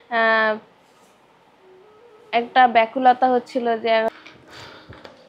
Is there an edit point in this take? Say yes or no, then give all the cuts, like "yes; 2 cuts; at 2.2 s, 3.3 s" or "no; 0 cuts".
yes; 1 cut; at 4.1 s